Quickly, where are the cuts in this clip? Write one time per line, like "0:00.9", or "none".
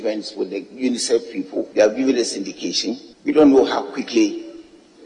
0:01.7
0:03.1

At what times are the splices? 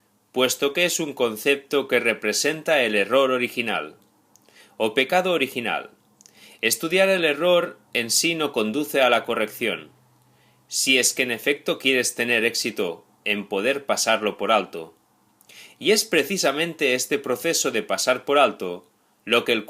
0:11.2

